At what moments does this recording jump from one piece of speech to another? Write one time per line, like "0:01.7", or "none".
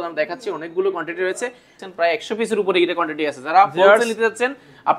0:01.8